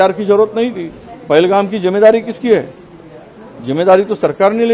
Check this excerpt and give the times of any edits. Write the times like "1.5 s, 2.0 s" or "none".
1.1 s